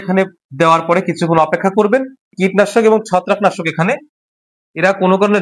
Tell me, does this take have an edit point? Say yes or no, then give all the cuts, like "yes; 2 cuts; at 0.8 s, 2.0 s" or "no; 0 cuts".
yes; 1 cut; at 2.3 s